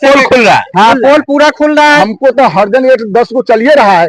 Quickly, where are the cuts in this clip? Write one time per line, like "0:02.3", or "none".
0:02.0